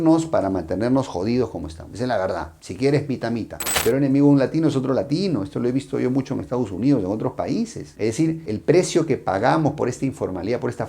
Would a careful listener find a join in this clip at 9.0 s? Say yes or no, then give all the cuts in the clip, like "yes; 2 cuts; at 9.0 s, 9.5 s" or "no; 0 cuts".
no; 1 cut; at 3.7 s